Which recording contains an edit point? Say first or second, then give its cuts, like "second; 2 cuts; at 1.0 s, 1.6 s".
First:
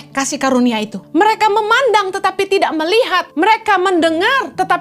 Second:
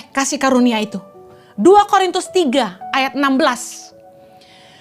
first; 2 cuts; at 1.0 s, 3.3 s